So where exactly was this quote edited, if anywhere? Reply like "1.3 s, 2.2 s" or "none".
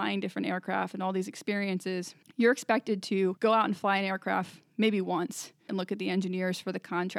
2.2 s, 3.4 s, 5.7 s